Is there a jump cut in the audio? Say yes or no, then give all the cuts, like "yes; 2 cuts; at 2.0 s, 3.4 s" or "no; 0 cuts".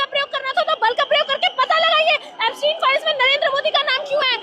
no; 0 cuts